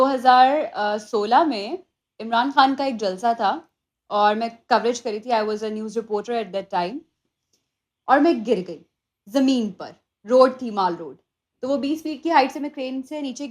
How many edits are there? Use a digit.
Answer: 1